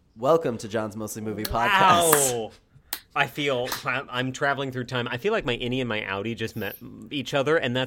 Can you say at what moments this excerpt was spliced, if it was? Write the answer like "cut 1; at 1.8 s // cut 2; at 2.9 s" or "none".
cut 1; at 1.7 s